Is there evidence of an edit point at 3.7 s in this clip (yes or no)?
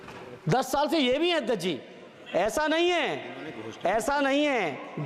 no